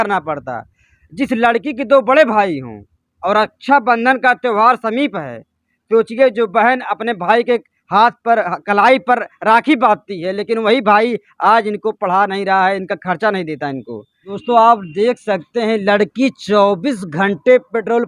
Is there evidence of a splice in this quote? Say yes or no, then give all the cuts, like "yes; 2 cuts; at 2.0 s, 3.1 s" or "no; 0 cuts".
yes; 1 cut; at 14.4 s